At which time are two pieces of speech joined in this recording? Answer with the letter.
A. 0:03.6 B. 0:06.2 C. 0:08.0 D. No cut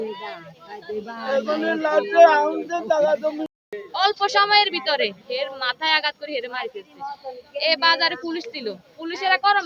A